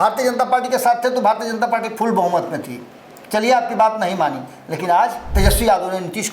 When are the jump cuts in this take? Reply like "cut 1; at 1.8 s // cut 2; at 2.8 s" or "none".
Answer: cut 1; at 5.3 s